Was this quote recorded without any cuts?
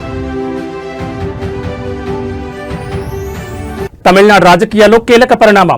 no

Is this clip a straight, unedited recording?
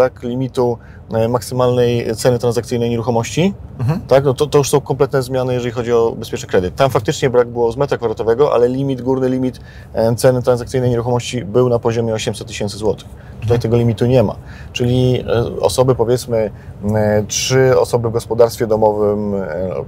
yes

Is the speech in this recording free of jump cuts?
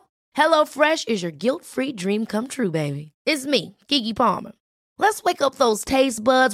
yes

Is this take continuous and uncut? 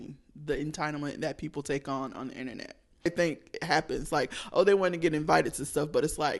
no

